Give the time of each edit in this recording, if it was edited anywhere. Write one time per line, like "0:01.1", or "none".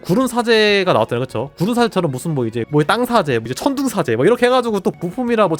0:02.6